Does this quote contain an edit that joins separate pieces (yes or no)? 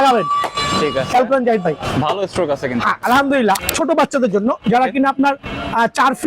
yes